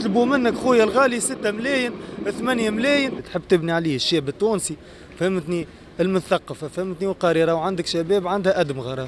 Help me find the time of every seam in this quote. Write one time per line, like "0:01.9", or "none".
0:03.3